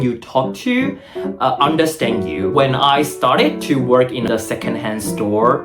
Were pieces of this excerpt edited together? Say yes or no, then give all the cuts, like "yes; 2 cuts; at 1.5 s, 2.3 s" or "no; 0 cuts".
yes; 2 cuts; at 2.5 s, 4.2 s